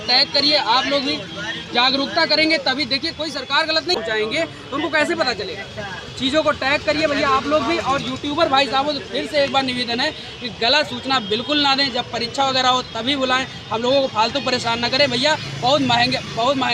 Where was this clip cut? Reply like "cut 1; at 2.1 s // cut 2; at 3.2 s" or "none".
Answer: cut 1; at 4.0 s